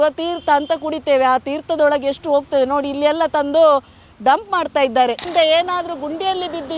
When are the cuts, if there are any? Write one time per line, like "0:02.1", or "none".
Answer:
0:05.2